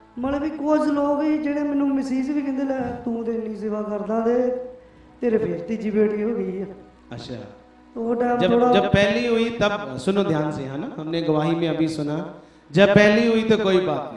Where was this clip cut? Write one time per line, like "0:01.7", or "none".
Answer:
none